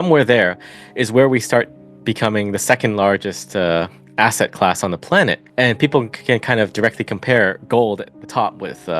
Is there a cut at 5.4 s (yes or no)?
yes